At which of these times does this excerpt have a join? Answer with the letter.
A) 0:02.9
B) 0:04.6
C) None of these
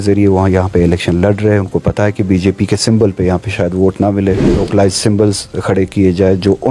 B